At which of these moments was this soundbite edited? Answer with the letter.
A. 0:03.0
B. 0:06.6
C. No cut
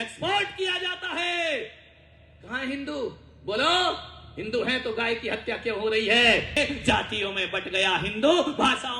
B